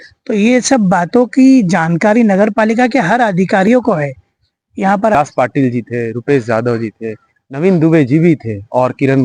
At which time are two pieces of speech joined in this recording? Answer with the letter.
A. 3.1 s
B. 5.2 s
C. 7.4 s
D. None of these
B